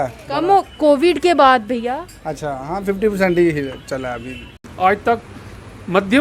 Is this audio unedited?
no; 1 cut; at 4.6 s

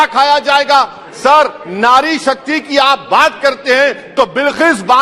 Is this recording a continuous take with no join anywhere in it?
yes; 0 cuts

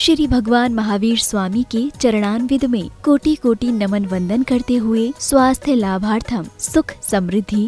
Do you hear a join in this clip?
no; 0 cuts

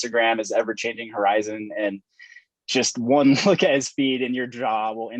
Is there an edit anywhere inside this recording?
no; 0 cuts

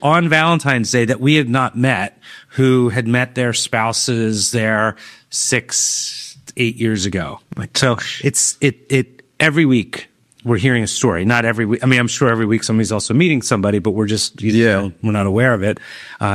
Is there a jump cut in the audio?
no; 0 cuts

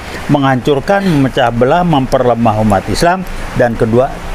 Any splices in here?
no; 0 cuts

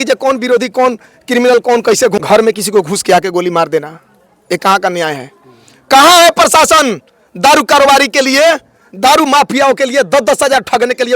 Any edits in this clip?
yes; 1 cut; at 2.2 s

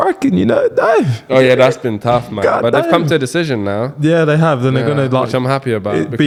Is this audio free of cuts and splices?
yes; 0 cuts

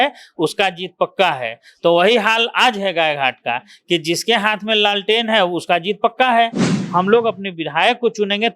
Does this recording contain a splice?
yes; 1 cut; at 6.8 s

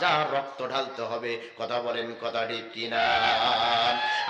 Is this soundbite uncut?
yes; 0 cuts

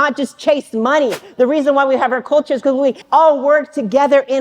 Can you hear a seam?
yes; 2 cuts; at 1.2 s, 3.0 s

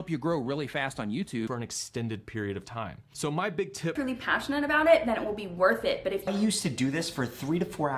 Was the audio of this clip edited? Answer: yes; 3 cuts; at 1.5 s, 4.0 s, 6.3 s

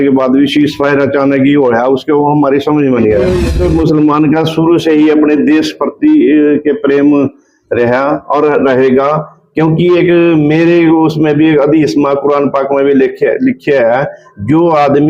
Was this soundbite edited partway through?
yes; 1 cut; at 3.4 s

